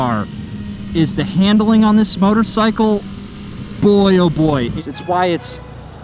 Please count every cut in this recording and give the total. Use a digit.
1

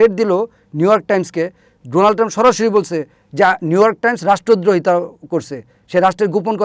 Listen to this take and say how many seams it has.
0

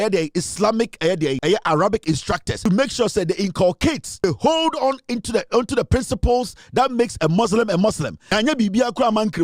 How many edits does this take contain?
4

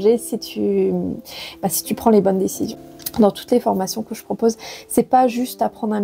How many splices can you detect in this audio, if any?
1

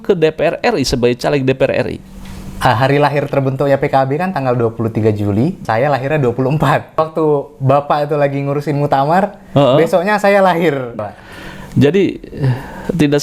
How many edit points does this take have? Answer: 3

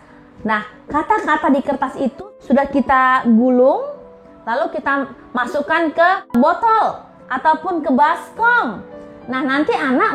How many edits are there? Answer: 2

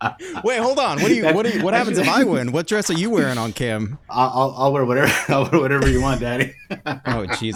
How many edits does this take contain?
0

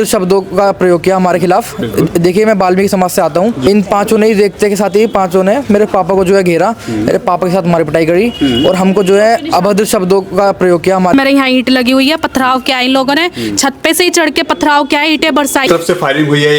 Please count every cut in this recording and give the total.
3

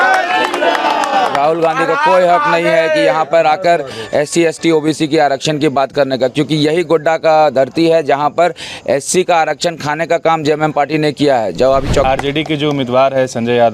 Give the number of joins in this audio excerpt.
1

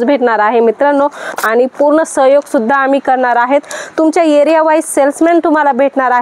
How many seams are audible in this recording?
1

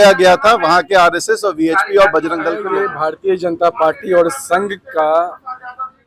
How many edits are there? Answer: 1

